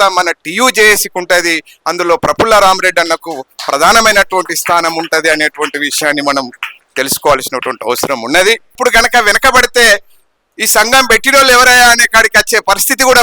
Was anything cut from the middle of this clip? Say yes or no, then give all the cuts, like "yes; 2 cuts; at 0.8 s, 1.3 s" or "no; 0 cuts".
yes; 1 cut; at 8.7 s